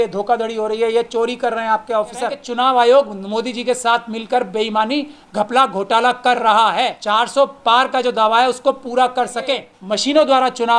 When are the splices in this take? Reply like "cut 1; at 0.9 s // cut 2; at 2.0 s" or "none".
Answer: cut 1; at 2.4 s // cut 2; at 7.0 s // cut 3; at 9.7 s